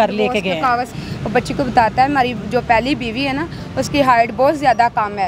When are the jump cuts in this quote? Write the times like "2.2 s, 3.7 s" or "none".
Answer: 0.9 s